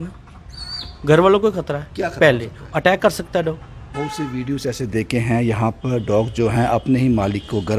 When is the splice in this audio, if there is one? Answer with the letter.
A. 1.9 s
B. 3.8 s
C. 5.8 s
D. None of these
B